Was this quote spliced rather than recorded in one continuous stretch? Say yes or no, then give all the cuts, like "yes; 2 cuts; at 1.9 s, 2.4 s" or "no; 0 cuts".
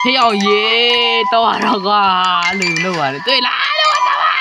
no; 0 cuts